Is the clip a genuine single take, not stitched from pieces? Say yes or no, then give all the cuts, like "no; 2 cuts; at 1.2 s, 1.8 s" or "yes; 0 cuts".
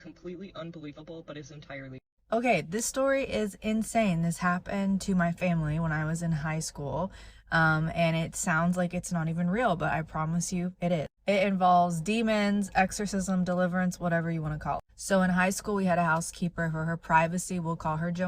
no; 1 cut; at 1.9 s